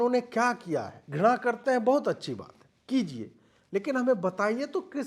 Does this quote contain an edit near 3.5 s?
no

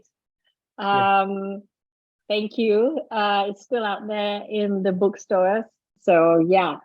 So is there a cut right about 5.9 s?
yes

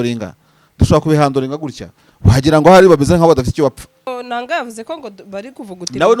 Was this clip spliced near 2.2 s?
no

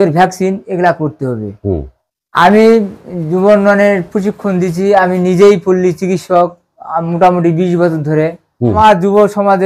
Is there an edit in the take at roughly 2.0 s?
yes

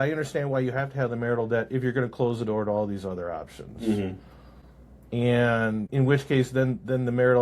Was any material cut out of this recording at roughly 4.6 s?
no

